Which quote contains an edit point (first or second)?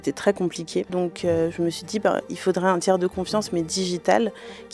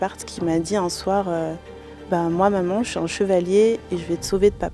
first